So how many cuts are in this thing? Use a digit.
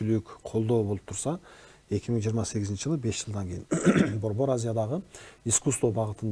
0